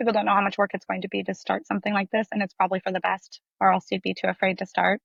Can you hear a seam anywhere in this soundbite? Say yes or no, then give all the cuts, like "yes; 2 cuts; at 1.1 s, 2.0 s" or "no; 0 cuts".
no; 0 cuts